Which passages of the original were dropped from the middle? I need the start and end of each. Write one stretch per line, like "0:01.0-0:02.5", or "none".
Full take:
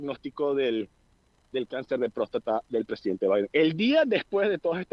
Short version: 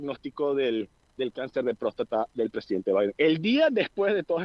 0:01.0-0:01.4